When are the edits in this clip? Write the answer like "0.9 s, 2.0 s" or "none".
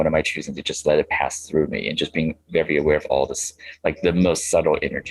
none